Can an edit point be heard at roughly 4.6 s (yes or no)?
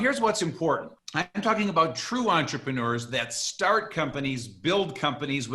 no